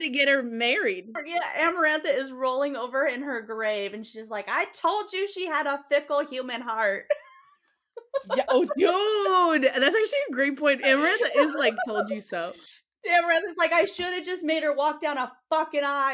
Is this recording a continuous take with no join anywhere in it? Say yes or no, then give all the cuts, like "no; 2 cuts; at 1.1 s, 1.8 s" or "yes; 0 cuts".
yes; 0 cuts